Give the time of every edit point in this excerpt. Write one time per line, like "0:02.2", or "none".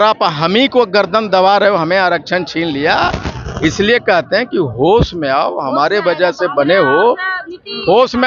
none